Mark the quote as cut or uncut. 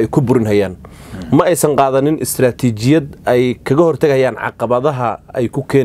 uncut